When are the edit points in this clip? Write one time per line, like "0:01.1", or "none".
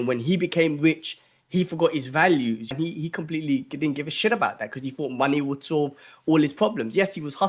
0:02.7